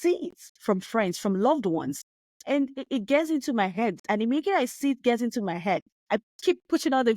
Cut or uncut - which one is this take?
cut